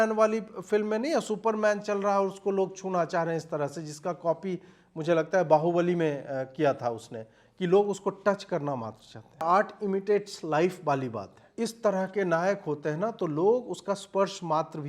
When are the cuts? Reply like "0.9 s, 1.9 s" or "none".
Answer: 9.4 s, 11.5 s

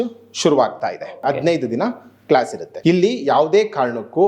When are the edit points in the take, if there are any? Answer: 1.2 s, 2.7 s

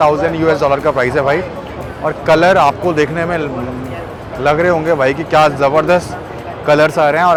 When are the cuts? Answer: none

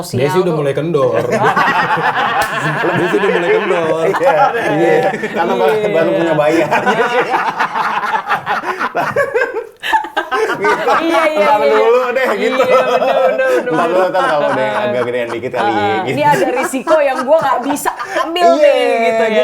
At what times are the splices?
none

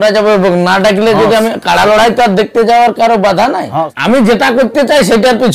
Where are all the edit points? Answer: 3.9 s

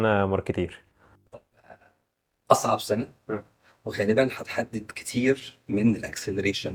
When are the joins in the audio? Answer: none

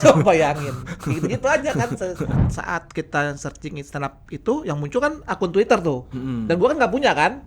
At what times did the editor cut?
2.4 s

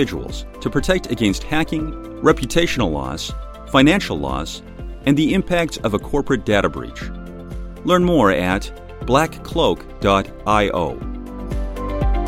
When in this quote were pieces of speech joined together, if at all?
11.3 s

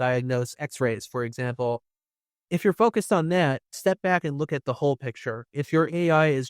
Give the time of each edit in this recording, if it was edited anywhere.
3.7 s

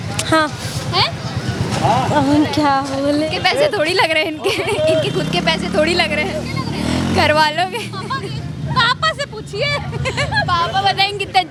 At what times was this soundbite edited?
none

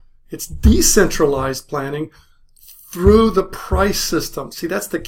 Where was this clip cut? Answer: none

